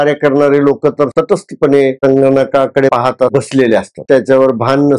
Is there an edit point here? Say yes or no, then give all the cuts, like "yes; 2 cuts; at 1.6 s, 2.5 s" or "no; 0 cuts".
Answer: yes; 2 cuts; at 1.1 s, 3.0 s